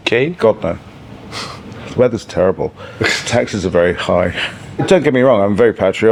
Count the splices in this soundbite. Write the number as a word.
zero